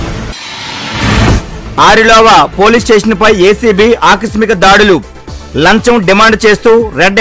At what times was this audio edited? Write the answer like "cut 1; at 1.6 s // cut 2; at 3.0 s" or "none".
cut 1; at 1.3 s